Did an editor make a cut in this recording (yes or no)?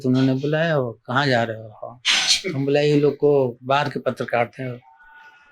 no